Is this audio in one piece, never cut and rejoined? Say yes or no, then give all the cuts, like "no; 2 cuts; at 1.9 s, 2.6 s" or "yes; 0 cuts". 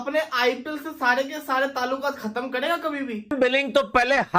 no; 1 cut; at 3.3 s